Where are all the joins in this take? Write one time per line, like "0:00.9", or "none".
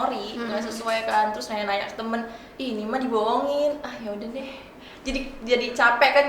none